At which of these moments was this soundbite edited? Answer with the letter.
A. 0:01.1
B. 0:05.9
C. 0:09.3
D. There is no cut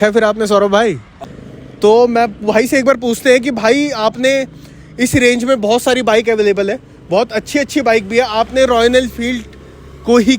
A